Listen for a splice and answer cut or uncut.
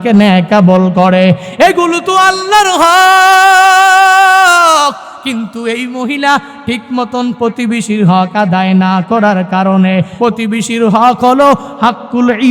cut